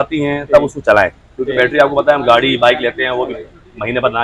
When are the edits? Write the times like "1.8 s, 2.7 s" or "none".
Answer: none